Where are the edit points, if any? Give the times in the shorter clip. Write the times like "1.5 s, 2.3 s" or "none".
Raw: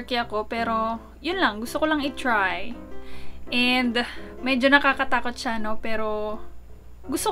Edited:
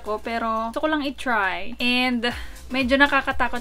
0.7 s, 1.7 s